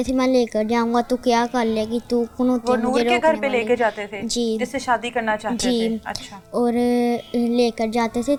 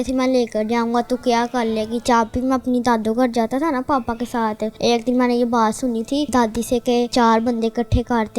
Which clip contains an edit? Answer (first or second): second